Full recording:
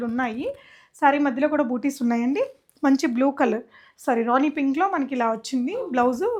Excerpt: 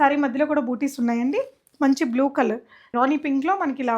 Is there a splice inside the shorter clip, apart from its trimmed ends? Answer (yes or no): yes